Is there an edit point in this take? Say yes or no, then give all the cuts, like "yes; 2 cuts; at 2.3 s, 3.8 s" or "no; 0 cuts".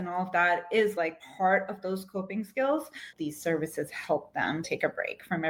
yes; 1 cut; at 3.1 s